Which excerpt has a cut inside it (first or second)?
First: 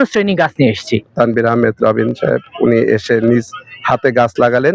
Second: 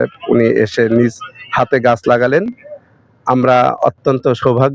first